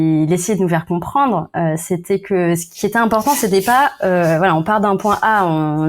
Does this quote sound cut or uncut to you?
uncut